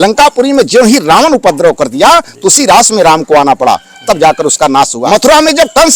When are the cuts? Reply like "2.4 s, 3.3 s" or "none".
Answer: 5.0 s